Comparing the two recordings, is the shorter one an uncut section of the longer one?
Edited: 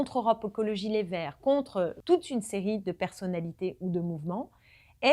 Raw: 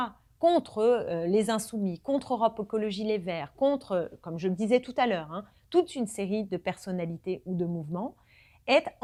no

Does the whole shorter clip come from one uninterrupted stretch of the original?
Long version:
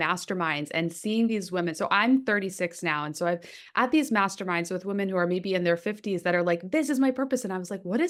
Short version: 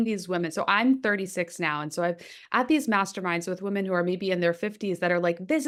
yes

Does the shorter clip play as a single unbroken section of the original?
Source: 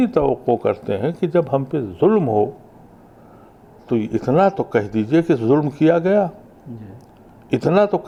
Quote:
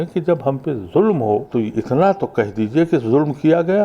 no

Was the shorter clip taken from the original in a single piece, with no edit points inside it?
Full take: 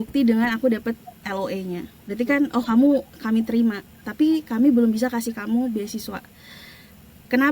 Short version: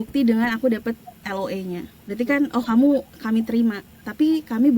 yes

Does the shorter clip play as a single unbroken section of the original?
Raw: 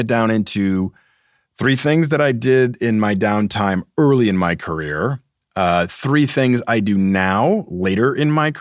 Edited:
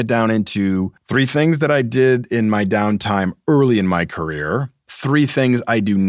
no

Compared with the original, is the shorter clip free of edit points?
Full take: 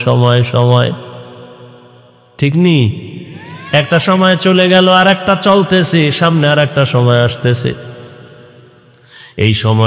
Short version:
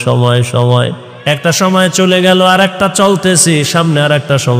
no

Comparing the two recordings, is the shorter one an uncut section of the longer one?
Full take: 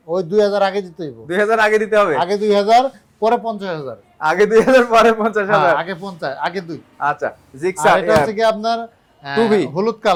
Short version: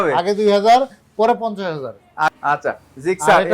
no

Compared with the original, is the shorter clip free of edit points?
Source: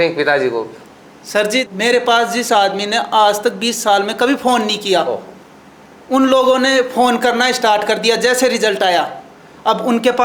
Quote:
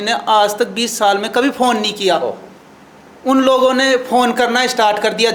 yes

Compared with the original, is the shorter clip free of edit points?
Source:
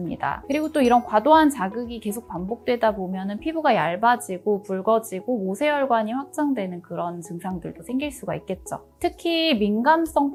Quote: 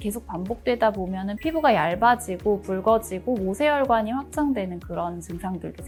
yes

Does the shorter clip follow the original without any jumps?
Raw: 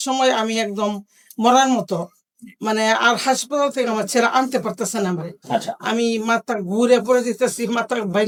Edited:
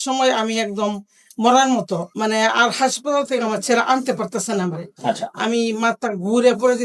no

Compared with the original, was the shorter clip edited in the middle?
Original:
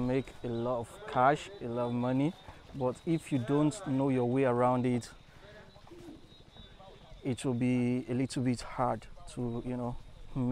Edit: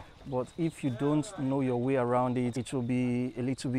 yes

